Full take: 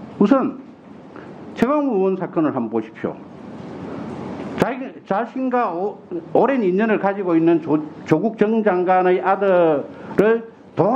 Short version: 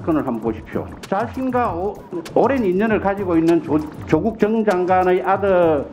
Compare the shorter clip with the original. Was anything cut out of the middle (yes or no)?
yes